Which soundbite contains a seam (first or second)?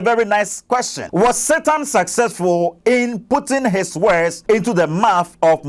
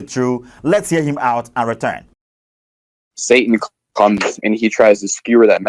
first